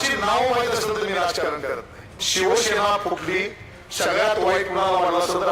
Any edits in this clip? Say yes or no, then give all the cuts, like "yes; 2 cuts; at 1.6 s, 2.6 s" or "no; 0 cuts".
yes; 1 cut; at 2.2 s